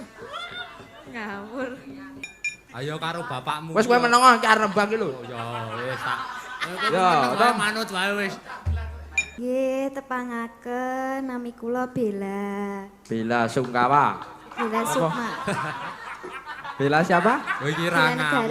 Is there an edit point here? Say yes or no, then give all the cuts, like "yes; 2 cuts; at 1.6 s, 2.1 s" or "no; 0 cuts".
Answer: yes; 2 cuts; at 2.2 s, 9.4 s